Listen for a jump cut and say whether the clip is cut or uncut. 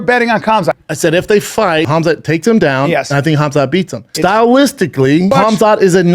cut